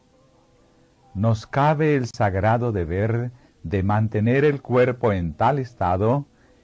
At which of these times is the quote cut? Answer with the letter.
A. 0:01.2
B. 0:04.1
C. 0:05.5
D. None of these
B